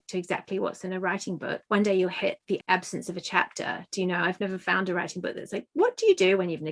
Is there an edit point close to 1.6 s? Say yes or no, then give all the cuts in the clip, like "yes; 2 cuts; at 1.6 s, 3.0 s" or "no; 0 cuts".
yes; 2 cuts; at 1.6 s, 2.6 s